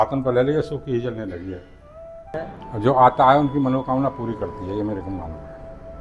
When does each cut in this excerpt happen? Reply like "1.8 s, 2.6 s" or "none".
2.3 s